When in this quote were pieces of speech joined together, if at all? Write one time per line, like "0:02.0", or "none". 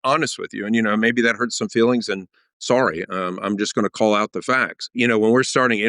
0:04.9